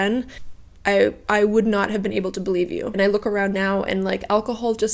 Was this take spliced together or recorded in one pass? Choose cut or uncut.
cut